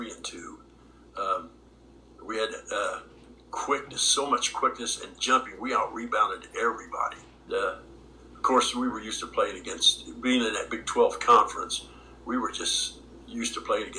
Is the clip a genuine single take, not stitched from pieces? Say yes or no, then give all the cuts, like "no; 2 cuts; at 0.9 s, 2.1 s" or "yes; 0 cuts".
no; 1 cut; at 7.4 s